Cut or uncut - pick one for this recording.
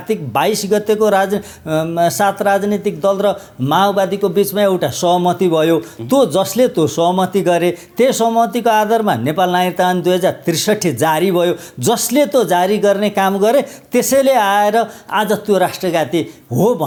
uncut